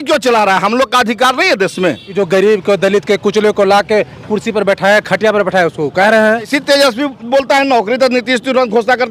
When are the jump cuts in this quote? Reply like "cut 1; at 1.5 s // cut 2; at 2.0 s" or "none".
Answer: cut 1; at 2.0 s // cut 2; at 6.5 s